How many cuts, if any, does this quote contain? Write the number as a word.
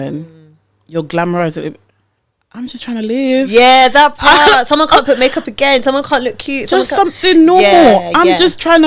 zero